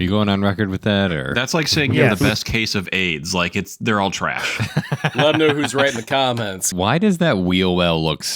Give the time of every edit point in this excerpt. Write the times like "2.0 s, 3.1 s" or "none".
5.2 s, 6.7 s